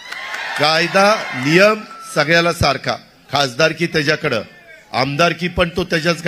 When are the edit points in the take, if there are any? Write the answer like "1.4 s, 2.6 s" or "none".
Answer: 3.1 s